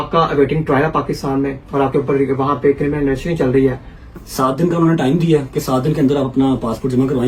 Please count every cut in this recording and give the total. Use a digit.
1